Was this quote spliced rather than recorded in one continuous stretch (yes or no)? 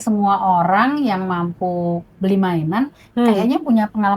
no